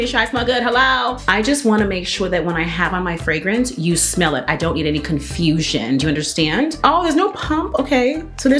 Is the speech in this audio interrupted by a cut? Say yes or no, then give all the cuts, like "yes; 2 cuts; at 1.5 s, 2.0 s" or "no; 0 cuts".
yes; 2 cuts; at 1.2 s, 6.8 s